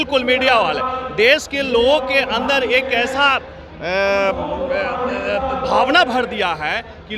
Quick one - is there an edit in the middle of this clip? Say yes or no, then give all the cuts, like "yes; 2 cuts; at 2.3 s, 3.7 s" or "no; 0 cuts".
no; 0 cuts